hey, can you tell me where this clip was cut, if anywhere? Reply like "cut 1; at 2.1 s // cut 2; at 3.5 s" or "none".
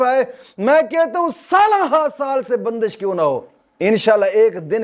none